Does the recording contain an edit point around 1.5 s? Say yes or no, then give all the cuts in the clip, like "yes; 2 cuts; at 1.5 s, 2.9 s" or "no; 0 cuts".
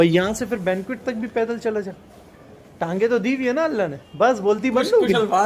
no; 1 cut; at 4.0 s